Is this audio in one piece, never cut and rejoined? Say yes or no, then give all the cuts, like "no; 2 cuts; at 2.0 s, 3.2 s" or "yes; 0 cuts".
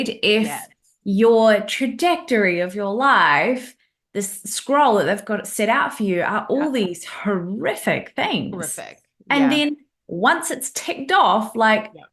yes; 0 cuts